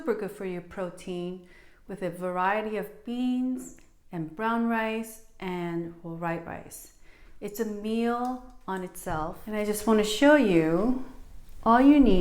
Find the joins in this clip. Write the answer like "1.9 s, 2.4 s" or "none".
9.4 s